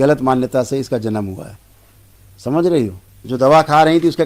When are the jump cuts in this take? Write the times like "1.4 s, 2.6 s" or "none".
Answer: 3.1 s